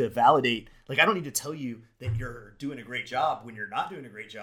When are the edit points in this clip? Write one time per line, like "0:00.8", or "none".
none